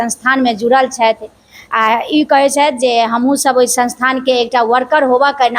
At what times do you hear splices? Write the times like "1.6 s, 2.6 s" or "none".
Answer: none